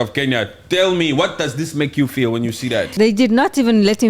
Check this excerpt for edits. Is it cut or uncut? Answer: cut